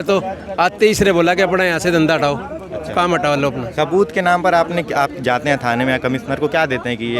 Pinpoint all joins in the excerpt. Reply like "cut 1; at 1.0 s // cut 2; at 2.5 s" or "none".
none